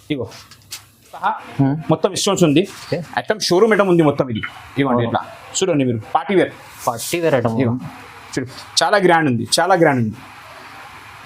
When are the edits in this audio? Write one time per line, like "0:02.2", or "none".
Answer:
0:01.2